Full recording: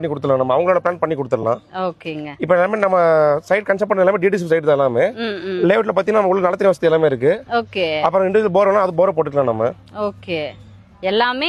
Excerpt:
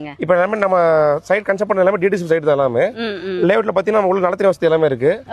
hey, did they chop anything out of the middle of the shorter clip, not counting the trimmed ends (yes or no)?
no